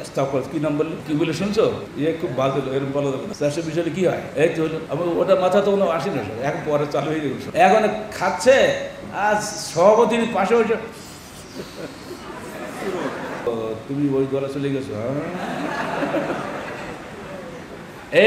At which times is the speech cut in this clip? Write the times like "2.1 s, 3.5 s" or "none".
1.0 s, 1.9 s, 3.3 s, 4.7 s, 7.4 s, 13.5 s